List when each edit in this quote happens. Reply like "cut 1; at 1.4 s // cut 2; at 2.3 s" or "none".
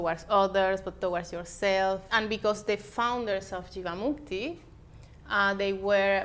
cut 1; at 2.1 s